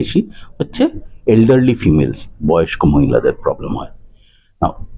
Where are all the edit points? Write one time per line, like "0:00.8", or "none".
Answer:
none